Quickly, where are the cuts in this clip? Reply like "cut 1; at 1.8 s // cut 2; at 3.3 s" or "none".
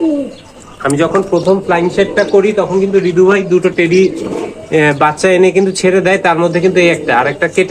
none